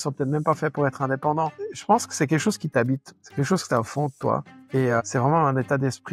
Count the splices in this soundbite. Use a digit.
3